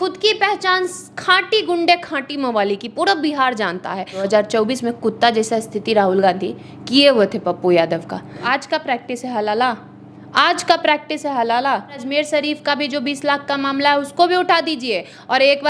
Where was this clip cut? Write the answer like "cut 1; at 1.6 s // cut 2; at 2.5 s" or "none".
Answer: cut 1; at 4.3 s // cut 2; at 8.4 s // cut 3; at 12.0 s